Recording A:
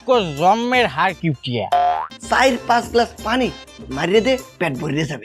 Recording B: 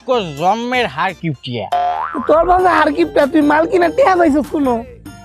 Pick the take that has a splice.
A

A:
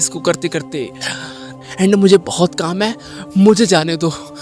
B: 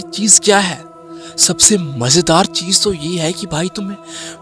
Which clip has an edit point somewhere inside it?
A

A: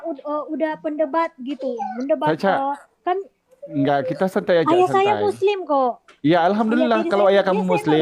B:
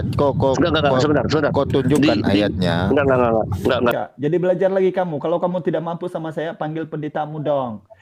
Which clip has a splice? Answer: B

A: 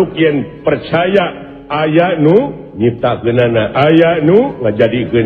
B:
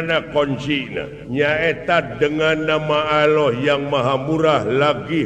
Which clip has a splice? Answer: B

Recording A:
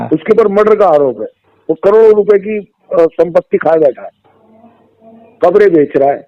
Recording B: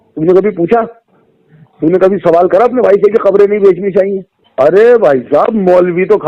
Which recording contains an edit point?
B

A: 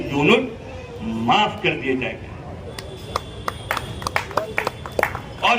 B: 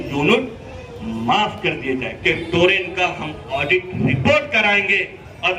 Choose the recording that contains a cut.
B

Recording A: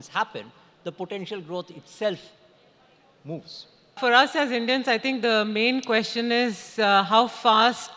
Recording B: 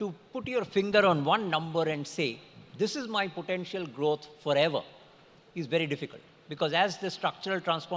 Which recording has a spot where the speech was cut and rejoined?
A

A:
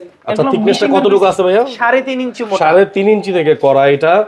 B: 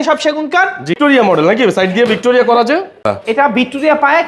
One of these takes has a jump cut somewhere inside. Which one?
B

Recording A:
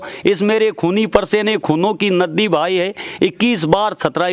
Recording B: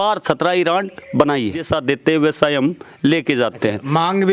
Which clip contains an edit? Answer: B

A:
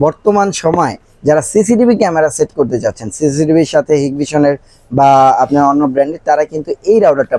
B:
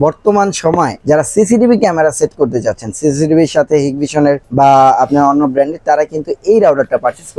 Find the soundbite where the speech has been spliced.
B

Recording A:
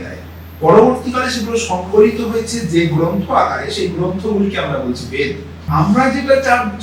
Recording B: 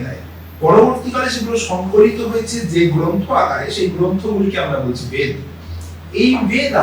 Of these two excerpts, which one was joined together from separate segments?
A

